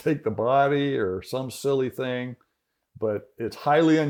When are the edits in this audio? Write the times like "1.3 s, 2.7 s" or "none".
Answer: none